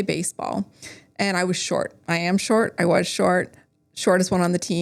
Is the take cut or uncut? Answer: uncut